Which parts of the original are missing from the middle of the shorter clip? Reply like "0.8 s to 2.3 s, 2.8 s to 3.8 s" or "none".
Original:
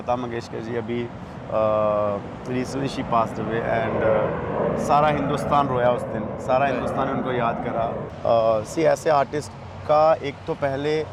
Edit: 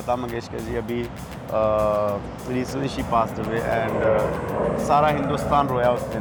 none